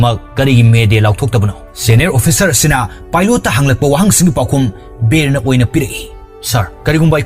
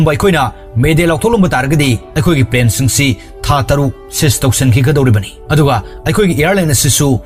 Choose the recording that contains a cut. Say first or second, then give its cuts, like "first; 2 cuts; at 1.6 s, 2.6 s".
first; 1 cut; at 1.7 s